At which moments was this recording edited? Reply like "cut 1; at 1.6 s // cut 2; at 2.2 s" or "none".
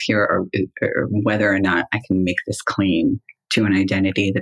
cut 1; at 3.3 s